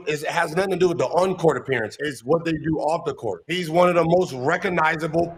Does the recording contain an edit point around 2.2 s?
no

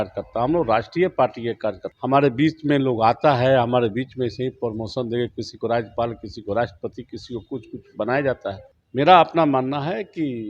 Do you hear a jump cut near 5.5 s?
no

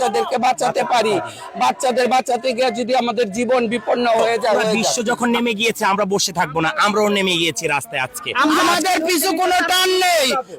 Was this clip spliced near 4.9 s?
yes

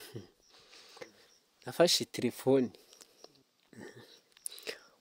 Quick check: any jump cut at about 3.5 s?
yes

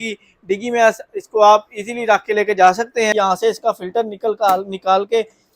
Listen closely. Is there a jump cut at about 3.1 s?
yes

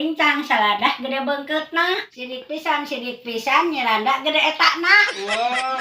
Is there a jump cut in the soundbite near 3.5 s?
no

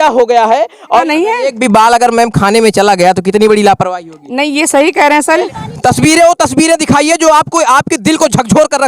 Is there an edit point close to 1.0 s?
yes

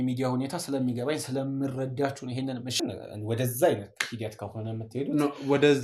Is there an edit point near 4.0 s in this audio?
no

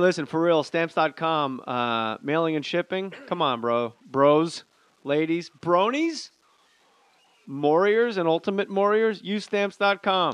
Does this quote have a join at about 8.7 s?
yes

